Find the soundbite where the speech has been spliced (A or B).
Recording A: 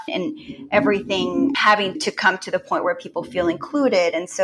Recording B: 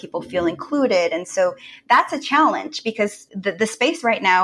B